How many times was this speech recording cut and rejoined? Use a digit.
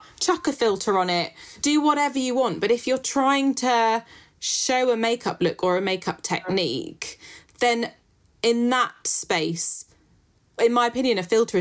2